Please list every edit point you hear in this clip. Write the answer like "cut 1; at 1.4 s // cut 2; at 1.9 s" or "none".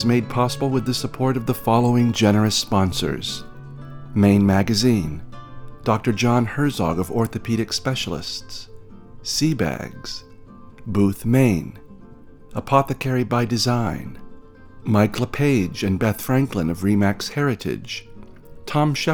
none

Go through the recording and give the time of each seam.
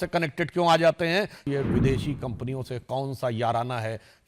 cut 1; at 1.4 s

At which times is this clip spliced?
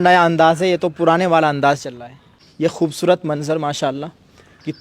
cut 1; at 2.4 s

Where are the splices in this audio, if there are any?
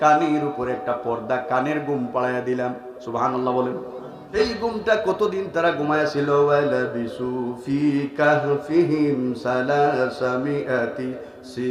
cut 1; at 4.4 s

